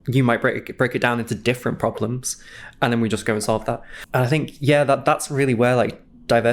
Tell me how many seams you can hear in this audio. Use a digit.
1